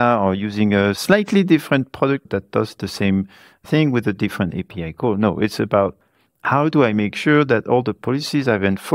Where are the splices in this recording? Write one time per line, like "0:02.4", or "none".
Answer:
0:01.0
0:02.2
0:03.6